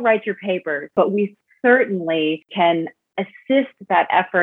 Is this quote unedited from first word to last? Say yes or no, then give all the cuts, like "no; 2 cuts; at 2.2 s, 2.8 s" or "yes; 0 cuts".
no; 2 cuts; at 0.9 s, 2.5 s